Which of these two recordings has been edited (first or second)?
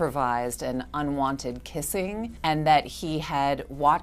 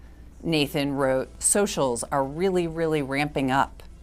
first